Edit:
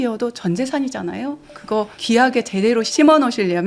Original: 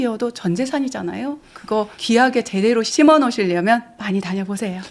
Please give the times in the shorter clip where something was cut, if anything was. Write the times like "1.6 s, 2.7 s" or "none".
none